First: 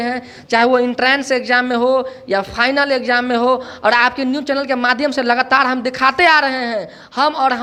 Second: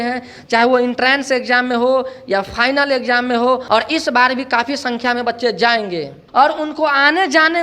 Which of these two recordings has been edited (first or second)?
second